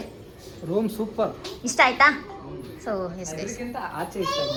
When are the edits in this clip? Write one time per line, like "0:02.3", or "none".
none